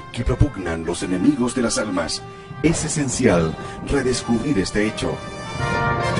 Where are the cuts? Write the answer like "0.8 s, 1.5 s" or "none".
1.6 s